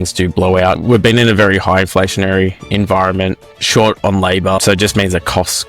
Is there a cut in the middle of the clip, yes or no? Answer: yes